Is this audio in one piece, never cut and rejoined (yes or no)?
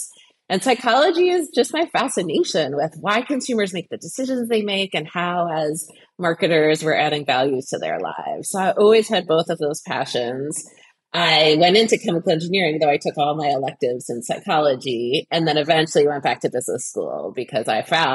yes